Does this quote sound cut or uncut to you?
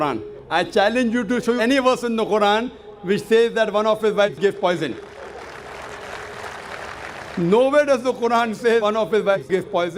uncut